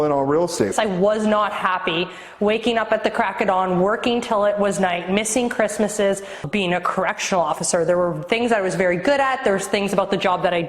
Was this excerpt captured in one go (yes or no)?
no